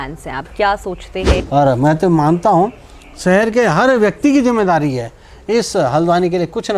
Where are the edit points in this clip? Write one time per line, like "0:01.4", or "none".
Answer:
0:01.4